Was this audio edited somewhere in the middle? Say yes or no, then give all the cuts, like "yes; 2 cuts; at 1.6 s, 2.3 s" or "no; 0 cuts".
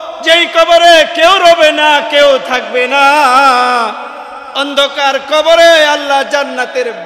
no; 0 cuts